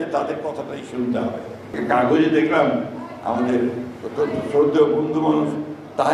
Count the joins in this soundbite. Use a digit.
1